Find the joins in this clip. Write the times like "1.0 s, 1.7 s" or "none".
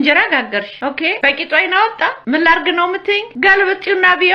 1.1 s, 2.2 s, 3.3 s